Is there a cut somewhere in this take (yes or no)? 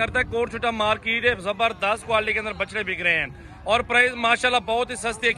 no